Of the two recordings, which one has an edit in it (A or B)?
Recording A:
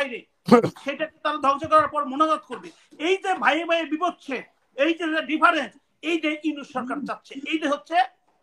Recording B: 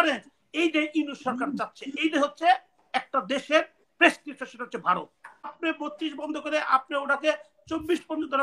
B